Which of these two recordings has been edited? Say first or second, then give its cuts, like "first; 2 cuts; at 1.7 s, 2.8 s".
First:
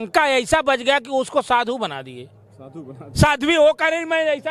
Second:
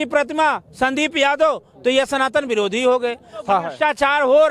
second; 1 cut; at 3.4 s